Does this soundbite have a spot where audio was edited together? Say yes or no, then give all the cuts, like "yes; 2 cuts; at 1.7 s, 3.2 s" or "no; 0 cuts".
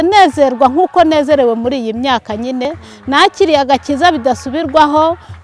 yes; 1 cut; at 2.7 s